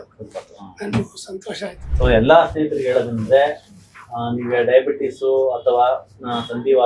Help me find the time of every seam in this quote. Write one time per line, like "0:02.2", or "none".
0:01.8